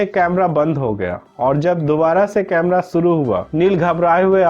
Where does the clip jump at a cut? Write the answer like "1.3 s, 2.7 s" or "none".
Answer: 3.4 s